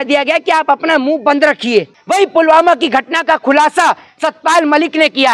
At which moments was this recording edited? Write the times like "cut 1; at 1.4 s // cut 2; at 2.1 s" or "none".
cut 1; at 2.0 s

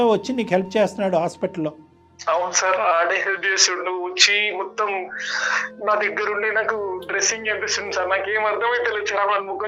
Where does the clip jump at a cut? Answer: none

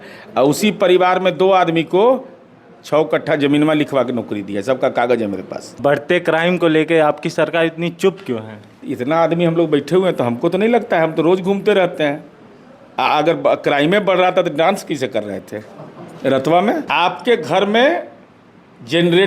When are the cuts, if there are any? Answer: cut 1; at 5.8 s // cut 2; at 16.9 s

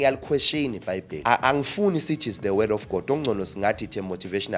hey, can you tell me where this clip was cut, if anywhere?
cut 1; at 1.1 s

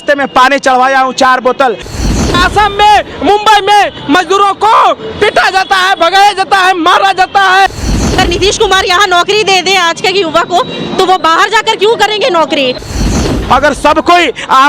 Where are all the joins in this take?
cut 1; at 2.0 s // cut 2; at 7.8 s // cut 3; at 13.0 s

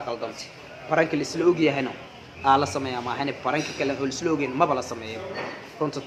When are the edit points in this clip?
none

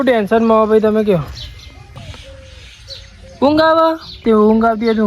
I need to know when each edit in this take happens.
cut 1; at 2.0 s // cut 2; at 4.1 s

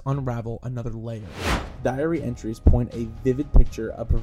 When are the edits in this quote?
cut 1; at 1.6 s

